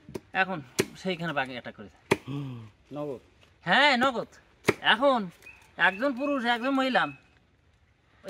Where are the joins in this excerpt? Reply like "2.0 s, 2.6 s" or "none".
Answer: none